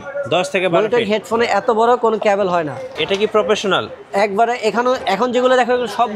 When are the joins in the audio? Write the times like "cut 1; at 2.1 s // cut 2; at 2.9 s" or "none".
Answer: none